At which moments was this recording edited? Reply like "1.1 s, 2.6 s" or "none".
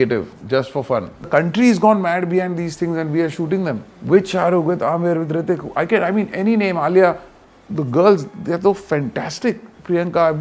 1.3 s